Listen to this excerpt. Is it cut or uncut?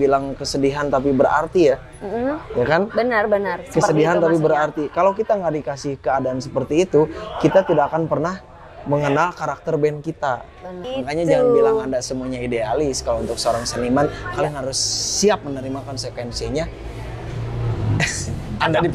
cut